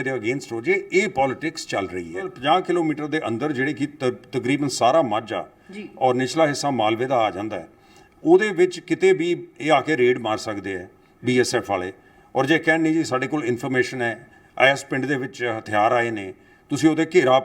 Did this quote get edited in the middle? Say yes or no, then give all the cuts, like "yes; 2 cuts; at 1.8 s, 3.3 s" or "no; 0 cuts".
yes; 1 cut; at 2.3 s